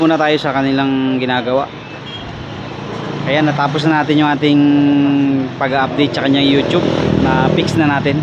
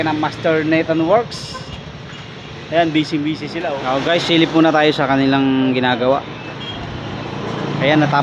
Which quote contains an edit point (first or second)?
second